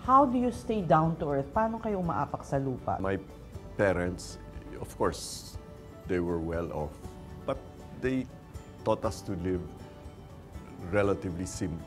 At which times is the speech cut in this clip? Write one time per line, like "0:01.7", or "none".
0:03.0